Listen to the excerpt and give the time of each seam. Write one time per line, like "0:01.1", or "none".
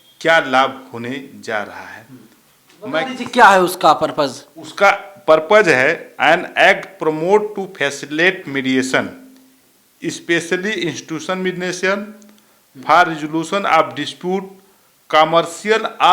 0:03.1